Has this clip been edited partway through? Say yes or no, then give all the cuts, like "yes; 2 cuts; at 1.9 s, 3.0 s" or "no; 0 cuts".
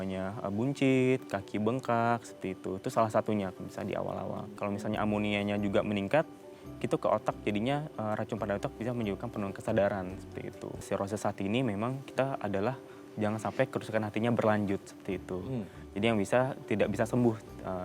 yes; 2 cuts; at 4.5 s, 10.7 s